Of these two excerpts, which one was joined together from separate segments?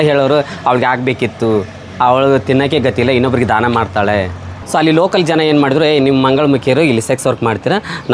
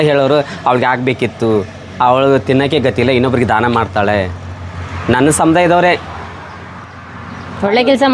first; 1 cut; at 4.6 s

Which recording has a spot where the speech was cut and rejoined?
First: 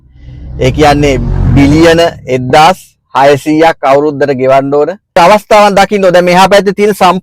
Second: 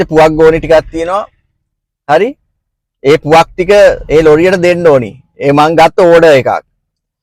first; 1 cut; at 5.2 s

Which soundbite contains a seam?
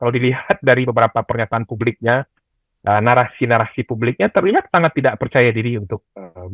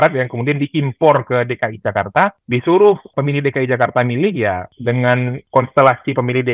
second; 4 cuts; at 2.4 s, 3.1 s, 4.7 s, 5.4 s

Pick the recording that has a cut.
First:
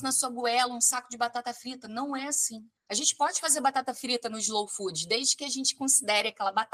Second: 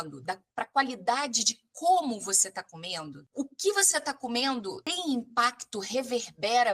second; 1 cut; at 4.8 s

